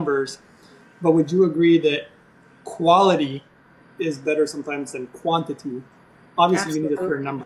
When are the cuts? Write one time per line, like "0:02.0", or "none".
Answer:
none